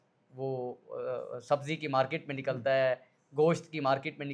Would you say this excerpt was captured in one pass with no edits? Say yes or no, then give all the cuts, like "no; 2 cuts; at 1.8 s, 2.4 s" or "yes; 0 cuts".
yes; 0 cuts